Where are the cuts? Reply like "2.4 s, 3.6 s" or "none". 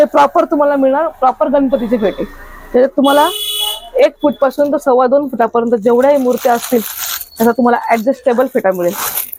none